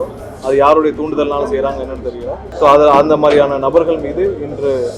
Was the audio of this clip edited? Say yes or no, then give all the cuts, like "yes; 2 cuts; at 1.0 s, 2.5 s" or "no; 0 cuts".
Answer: yes; 1 cut; at 2.4 s